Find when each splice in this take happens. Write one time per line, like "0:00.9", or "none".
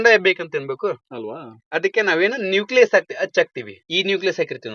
0:03.8